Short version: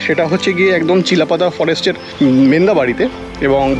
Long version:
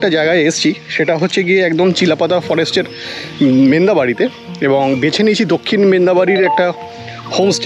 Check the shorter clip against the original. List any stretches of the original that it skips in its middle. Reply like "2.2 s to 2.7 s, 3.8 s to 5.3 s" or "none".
3.0 s to 3.3 s

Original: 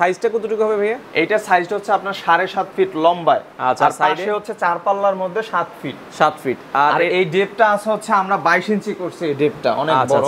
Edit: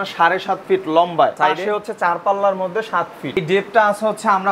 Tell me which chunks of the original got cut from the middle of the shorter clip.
3.4 s to 4.0 s, 6.0 s to 7.3 s

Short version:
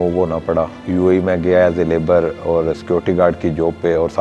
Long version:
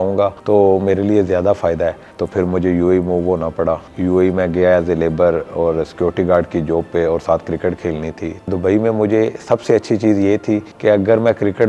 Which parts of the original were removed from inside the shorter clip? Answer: none

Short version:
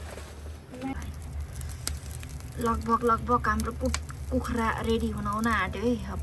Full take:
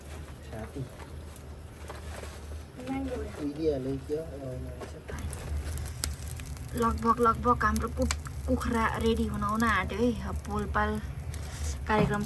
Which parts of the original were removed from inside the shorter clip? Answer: 3.0 s to 5.1 s

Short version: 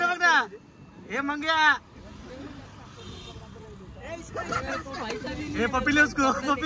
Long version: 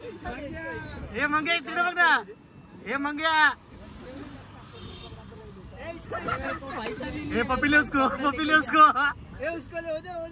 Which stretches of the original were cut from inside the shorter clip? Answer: none

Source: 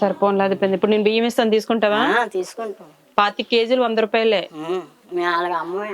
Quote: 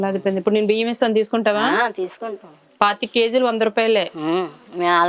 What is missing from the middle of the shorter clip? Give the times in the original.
none

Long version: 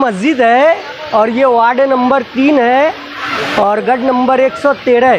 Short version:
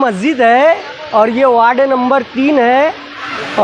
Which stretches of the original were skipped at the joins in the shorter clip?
none

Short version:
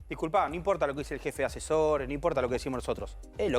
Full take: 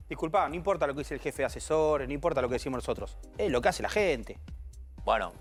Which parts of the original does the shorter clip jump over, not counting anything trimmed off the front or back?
none

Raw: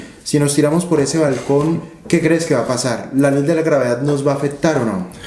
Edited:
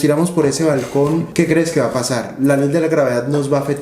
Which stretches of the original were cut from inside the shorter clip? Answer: 1.8 s to 2.0 s

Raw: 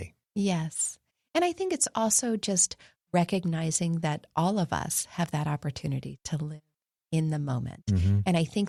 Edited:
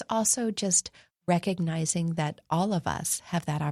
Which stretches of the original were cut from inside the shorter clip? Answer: none

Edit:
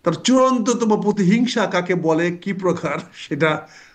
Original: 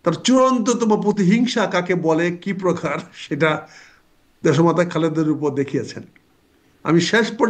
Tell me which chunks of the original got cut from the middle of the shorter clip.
none

